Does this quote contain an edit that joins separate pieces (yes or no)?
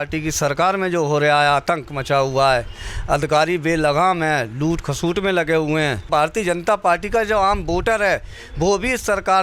yes